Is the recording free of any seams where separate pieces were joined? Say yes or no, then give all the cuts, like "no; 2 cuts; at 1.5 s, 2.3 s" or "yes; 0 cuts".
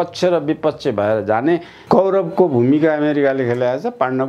no; 1 cut; at 1.7 s